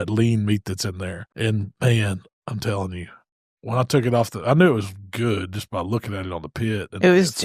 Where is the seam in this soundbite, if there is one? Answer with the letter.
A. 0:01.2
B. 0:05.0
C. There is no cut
A